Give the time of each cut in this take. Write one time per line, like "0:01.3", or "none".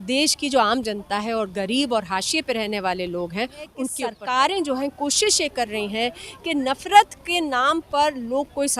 0:04.1